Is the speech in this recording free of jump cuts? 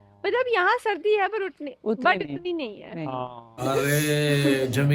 no; 1 cut; at 3.6 s

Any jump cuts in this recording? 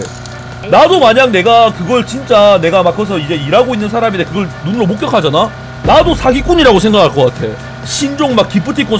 no; 0 cuts

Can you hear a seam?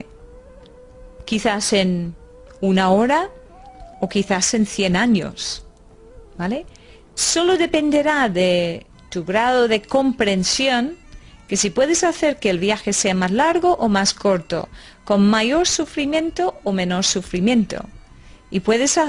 yes; 1 cut; at 14.1 s

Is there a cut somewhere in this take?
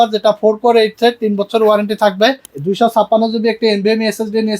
yes; 1 cut; at 2.5 s

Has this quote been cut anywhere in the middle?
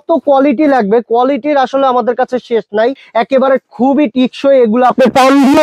yes; 1 cut; at 3.0 s

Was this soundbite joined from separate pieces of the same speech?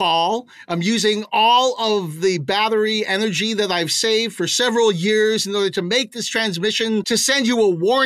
yes; 1 cut; at 7.1 s

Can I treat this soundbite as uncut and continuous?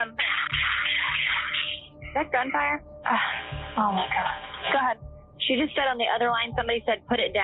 yes; 0 cuts

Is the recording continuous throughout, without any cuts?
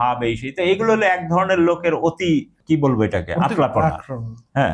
no; 1 cut; at 2.5 s

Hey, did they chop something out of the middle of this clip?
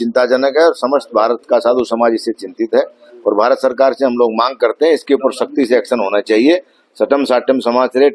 no; 0 cuts

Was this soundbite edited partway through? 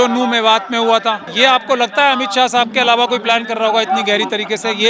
yes; 1 cut; at 1.3 s

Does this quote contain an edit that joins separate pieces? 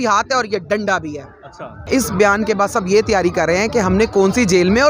yes; 1 cut; at 1.8 s

